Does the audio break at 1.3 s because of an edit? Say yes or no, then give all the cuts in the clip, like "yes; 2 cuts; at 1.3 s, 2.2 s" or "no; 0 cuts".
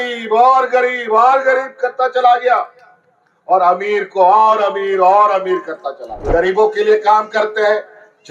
no; 1 cut; at 6.2 s